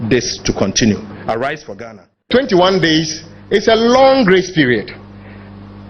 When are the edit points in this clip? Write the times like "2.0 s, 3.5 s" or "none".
2.3 s